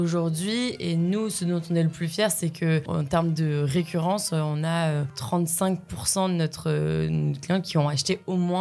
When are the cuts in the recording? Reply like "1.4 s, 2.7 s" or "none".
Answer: 2.9 s, 5.2 s